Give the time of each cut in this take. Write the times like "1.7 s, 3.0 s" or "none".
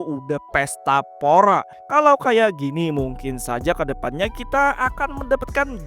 1.7 s